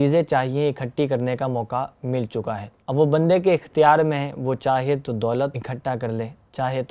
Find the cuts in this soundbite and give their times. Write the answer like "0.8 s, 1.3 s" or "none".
2.7 s, 5.5 s